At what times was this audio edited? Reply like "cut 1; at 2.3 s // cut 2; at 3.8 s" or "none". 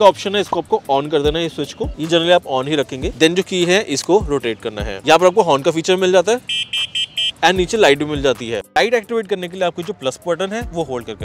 none